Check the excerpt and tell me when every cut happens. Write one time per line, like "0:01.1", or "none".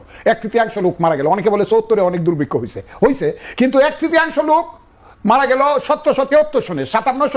none